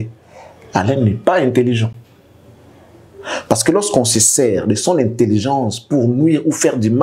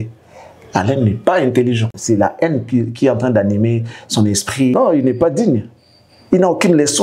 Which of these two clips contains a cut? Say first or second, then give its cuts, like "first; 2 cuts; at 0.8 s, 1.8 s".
second; 2 cuts; at 2.0 s, 4.7 s